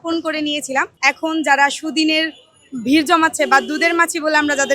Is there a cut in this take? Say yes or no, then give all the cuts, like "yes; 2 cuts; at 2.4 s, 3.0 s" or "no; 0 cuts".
yes; 1 cut; at 0.9 s